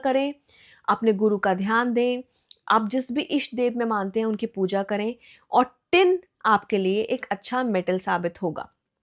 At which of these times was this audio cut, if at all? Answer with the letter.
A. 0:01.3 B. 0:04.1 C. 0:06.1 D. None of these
D